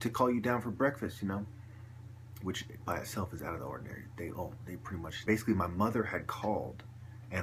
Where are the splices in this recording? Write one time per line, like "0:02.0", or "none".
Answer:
none